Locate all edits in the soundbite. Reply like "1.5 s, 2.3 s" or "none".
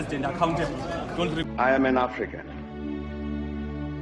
1.4 s